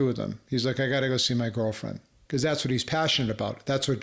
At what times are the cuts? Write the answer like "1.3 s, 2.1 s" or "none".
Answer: 2.1 s

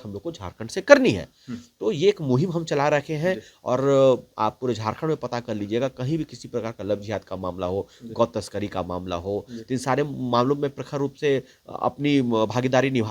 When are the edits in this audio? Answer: none

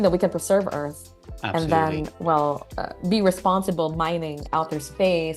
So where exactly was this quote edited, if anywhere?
none

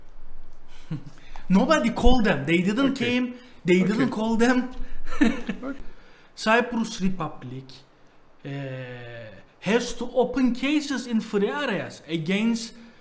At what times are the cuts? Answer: 5.8 s

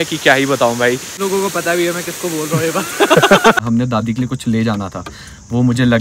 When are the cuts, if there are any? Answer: 0.8 s, 3.6 s

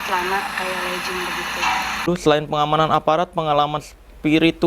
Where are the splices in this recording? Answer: 2.0 s

